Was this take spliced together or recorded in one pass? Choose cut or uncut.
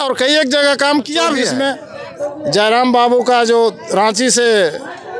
cut